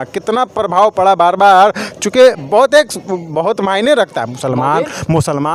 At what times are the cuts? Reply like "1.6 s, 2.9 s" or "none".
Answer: none